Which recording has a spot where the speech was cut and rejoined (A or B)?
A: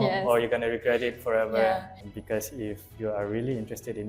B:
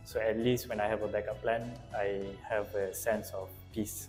A